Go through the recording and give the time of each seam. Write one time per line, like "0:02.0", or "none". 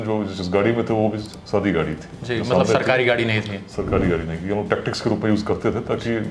none